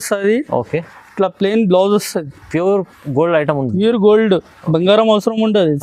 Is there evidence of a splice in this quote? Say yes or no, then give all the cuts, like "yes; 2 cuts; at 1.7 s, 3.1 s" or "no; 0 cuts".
no; 0 cuts